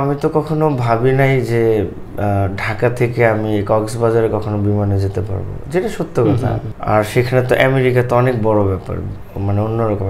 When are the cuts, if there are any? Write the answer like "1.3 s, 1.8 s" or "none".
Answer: 6.7 s